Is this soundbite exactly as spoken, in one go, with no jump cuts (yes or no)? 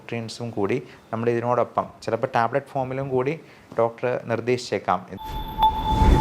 no